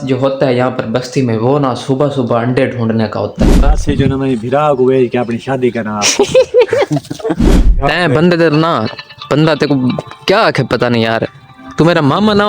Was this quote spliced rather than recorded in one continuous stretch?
yes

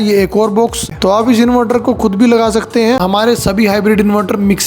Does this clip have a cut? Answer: yes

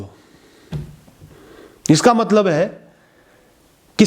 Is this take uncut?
yes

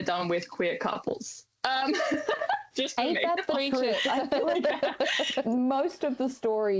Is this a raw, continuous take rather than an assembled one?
yes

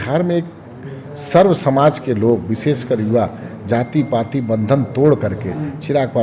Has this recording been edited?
no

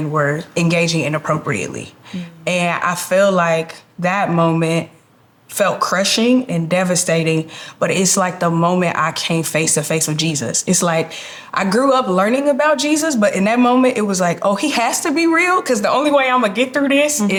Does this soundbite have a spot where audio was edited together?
no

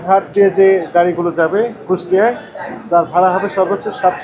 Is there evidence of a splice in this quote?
no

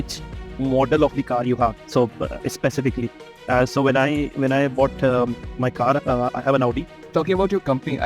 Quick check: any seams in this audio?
yes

